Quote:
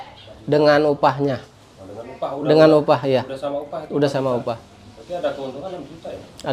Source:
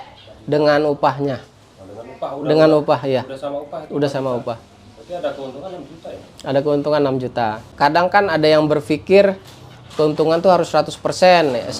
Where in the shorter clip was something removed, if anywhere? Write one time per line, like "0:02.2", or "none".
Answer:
none